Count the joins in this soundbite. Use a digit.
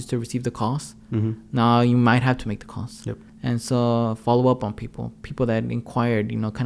0